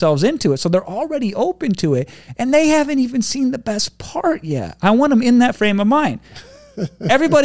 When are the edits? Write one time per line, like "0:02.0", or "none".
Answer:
none